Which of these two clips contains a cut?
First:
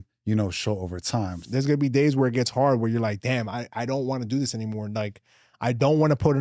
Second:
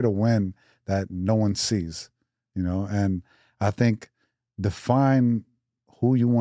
first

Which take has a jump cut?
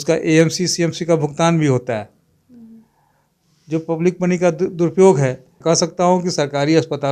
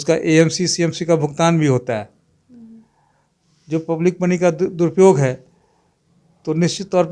first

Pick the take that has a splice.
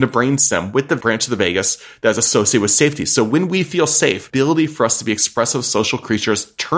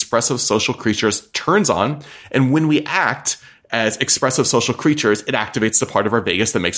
first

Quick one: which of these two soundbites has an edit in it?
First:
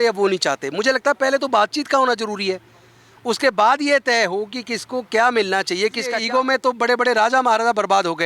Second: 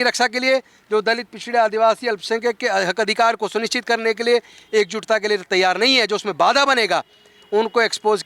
first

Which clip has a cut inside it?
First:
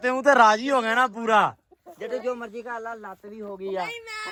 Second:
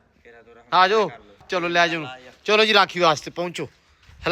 second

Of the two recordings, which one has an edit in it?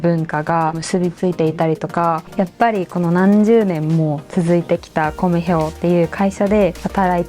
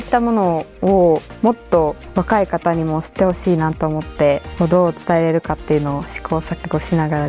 first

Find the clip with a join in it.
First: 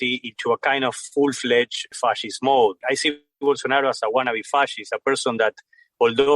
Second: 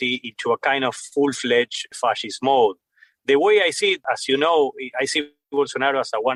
first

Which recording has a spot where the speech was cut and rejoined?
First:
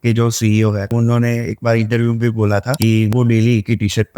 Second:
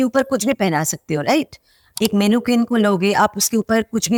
first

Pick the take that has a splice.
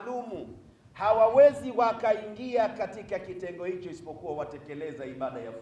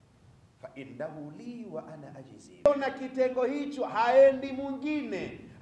second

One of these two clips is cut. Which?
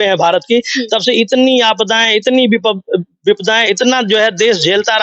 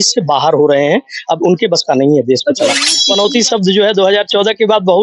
second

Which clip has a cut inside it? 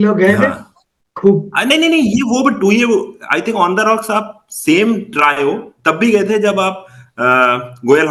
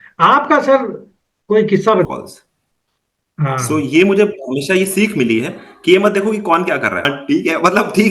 second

